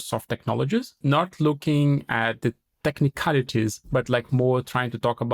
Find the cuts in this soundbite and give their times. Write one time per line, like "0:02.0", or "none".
0:01.0
0:02.4
0:03.8